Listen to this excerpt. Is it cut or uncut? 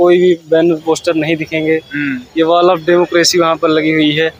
uncut